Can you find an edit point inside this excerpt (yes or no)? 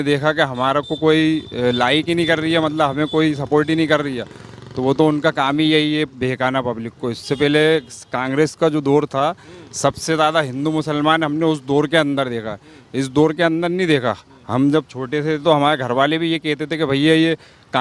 no